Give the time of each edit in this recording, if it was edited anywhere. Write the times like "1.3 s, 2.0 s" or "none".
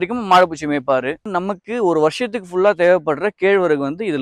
1.3 s